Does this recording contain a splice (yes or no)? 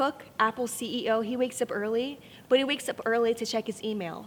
no